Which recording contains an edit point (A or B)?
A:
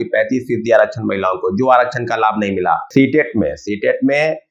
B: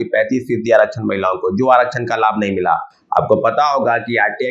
A